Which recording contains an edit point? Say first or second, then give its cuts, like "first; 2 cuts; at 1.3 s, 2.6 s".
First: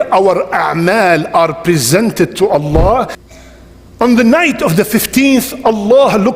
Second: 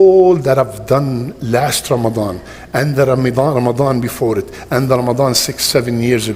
first; 1 cut; at 3.2 s